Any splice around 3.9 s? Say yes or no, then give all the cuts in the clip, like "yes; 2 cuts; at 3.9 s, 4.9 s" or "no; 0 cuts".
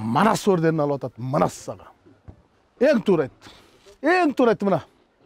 no; 1 cut; at 2.7 s